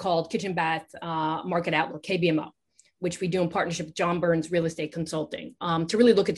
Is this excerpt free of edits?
yes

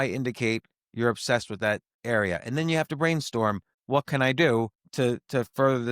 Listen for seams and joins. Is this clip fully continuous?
no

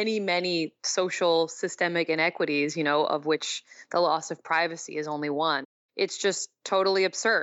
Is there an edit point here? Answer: yes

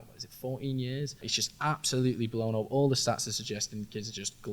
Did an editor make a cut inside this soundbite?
yes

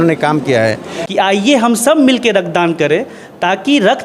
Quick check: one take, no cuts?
no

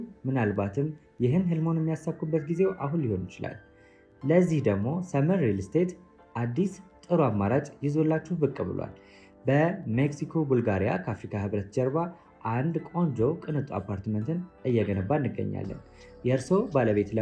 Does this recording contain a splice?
no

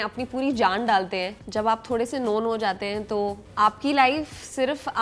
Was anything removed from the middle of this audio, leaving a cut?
yes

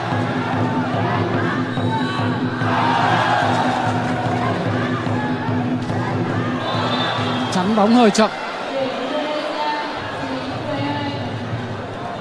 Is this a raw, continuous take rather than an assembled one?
yes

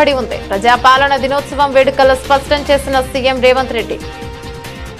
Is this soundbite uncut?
no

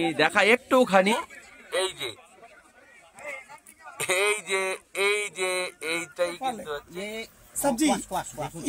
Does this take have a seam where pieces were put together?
yes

